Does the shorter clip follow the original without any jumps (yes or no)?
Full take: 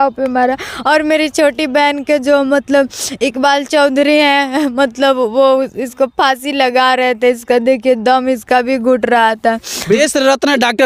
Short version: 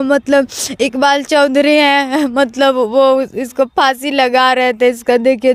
yes